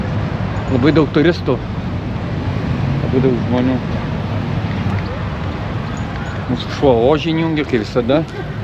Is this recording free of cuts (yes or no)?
yes